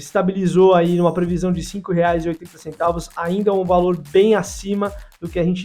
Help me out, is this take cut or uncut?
uncut